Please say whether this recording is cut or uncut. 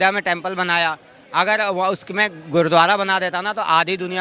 uncut